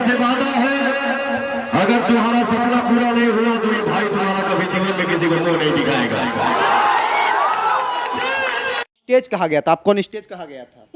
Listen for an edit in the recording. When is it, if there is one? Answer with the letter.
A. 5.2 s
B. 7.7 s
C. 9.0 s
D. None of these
C